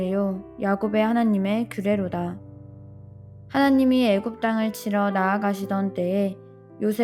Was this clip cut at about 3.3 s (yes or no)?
no